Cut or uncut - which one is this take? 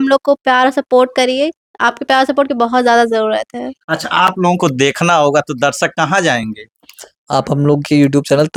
uncut